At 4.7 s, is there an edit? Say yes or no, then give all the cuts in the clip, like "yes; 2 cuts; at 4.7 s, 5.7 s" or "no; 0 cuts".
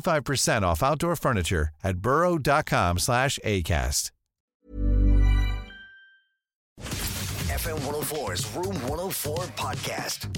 no; 1 cut; at 6.8 s